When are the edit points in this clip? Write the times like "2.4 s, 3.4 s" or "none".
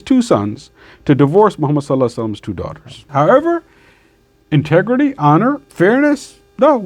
3.0 s, 5.7 s